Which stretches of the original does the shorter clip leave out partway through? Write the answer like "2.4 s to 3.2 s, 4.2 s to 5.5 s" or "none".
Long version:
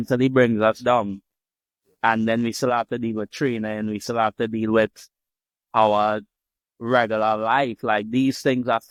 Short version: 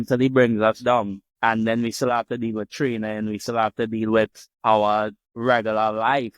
1.2 s to 1.8 s, 5.1 s to 5.5 s, 6.3 s to 6.7 s